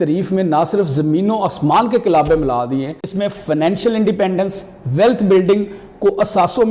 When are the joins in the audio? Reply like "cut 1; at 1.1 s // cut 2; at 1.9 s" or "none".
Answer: cut 1; at 3.1 s